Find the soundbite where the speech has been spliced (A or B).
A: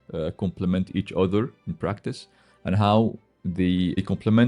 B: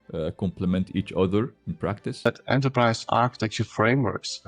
B